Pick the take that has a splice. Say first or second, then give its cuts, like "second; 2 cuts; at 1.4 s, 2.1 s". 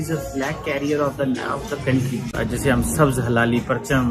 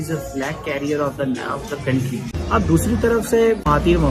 first; 1 cut; at 2.3 s